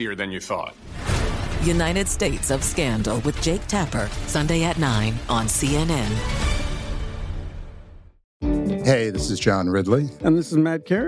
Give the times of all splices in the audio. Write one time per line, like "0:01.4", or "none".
0:08.3